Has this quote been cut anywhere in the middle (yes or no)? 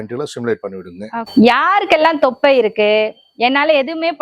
yes